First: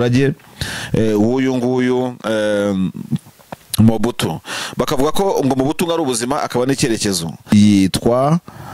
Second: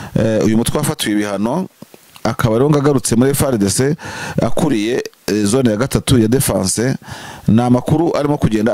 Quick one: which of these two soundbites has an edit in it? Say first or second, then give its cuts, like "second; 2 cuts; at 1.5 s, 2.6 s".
first; 1 cut; at 7.5 s